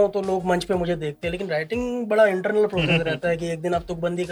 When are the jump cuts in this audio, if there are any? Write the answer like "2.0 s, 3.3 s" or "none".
none